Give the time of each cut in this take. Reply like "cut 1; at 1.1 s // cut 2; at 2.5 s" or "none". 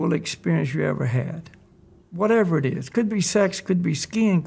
none